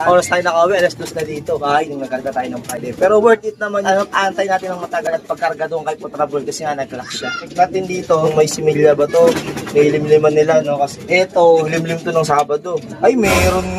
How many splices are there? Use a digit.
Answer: 0